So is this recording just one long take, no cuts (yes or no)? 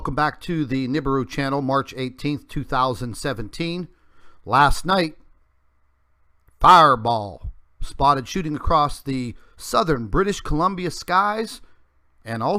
yes